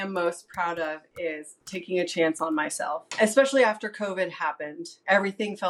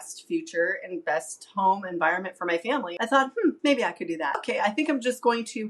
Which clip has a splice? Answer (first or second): second